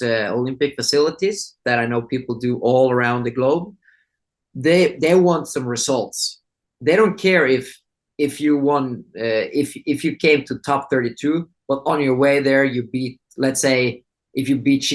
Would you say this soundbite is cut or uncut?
uncut